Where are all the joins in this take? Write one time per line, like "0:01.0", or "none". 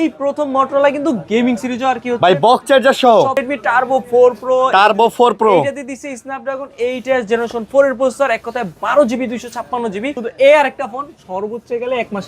0:03.4
0:10.2